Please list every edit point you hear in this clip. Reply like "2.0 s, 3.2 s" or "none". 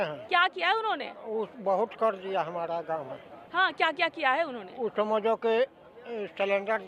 none